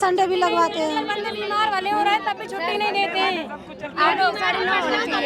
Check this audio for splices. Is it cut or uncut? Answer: uncut